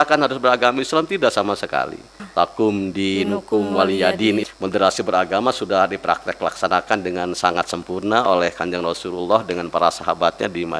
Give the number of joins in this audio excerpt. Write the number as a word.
two